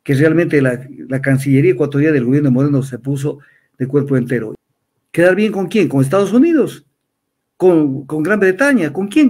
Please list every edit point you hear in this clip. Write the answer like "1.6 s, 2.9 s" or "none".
4.5 s